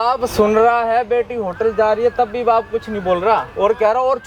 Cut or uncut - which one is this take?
uncut